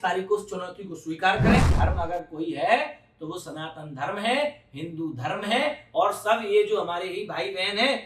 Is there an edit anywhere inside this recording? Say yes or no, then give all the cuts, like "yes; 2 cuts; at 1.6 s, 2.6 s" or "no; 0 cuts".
yes; 1 cut; at 1.7 s